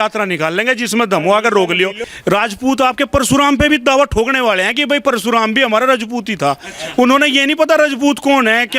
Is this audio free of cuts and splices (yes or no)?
no